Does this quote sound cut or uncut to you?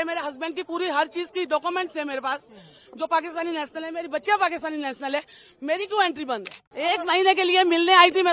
cut